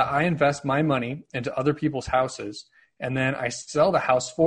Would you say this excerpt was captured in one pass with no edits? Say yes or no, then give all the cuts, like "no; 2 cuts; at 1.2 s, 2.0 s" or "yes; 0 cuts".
yes; 0 cuts